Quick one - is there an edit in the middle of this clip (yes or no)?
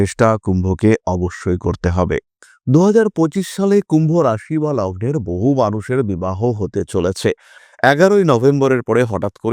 yes